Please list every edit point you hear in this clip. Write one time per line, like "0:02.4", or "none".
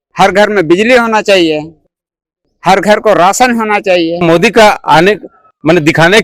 0:04.2